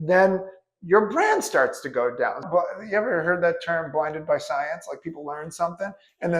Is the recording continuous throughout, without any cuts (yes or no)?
no